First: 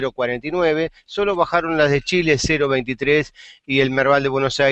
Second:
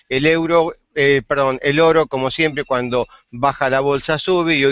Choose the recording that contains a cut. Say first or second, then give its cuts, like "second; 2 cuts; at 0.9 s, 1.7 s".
first; 1 cut; at 2.6 s